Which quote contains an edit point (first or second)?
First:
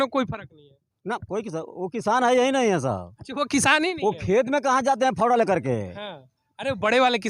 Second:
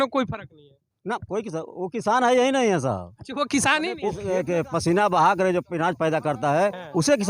second